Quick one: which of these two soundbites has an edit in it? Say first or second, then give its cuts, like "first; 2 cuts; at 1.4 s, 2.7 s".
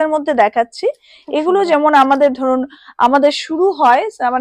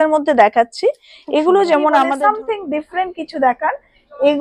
second; 1 cut; at 2.1 s